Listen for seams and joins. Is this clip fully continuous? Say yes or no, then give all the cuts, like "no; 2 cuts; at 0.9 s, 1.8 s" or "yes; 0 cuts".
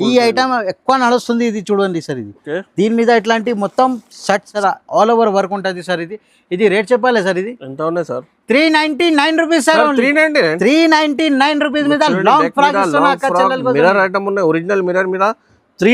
no; 1 cut; at 4.5 s